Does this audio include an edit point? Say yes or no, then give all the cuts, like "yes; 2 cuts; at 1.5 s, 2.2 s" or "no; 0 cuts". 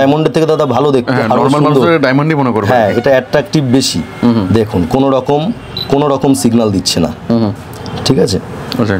no; 0 cuts